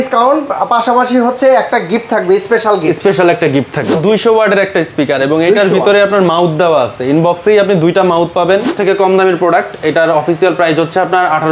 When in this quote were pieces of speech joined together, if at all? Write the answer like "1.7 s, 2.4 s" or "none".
4.0 s, 8.7 s